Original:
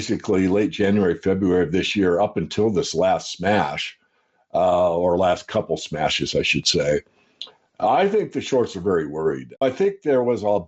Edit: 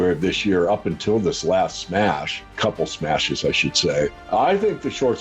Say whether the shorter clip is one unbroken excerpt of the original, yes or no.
no